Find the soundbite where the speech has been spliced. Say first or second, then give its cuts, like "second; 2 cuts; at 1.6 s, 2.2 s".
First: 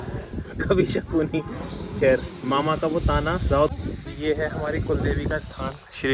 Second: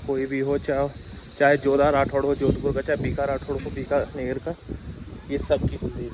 first; 1 cut; at 3.7 s